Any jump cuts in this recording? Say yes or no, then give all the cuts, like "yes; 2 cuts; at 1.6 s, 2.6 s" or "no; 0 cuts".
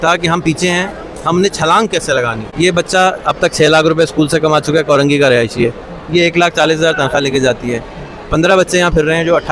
yes; 1 cut; at 2.4 s